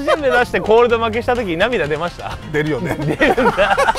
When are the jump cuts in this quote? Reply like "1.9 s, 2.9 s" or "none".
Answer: 2.4 s